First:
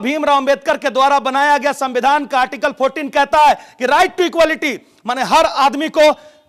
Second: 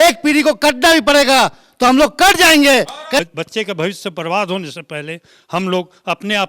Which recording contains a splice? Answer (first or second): second